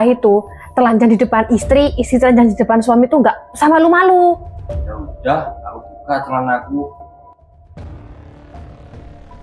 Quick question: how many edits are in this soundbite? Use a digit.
2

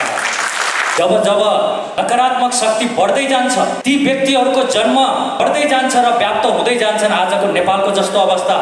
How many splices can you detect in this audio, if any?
4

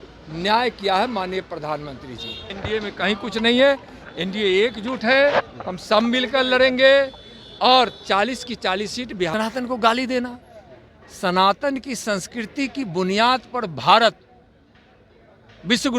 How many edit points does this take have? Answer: 2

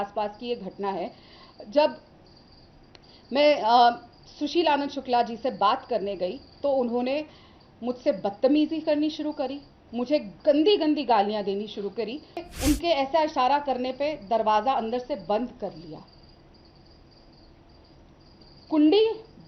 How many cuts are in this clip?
1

